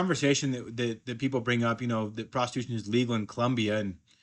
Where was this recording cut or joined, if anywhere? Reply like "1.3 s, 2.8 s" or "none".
none